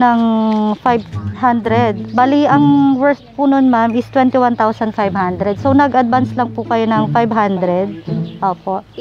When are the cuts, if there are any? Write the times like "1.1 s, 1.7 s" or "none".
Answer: 2.0 s